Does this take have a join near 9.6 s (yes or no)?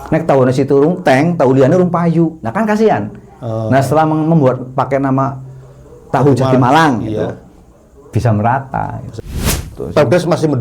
yes